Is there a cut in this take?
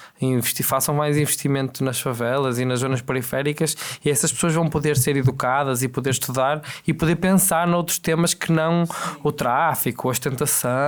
no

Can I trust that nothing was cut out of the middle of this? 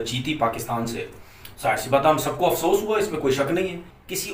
yes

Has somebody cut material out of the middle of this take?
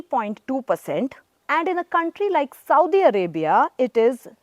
yes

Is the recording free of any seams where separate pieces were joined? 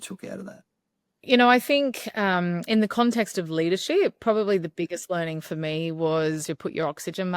no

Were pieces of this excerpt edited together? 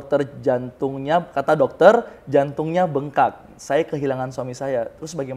no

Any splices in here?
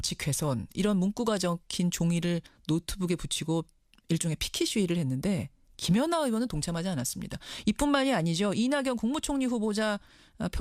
yes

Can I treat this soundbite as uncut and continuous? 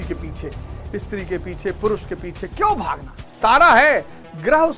no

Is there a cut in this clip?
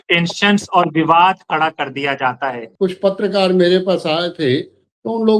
yes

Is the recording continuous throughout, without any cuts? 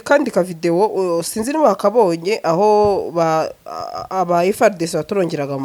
yes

